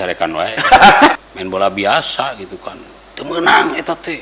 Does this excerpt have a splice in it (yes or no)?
yes